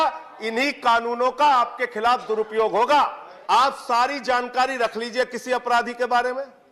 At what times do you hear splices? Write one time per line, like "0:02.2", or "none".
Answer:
0:03.3